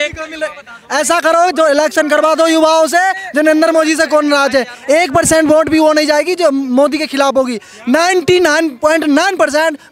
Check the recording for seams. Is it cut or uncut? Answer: uncut